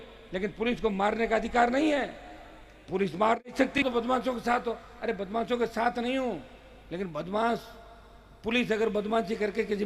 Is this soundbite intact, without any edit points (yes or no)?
no